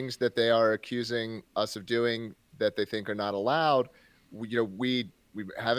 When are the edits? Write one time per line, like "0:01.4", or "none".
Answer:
none

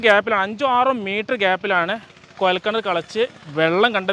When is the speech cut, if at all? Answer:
none

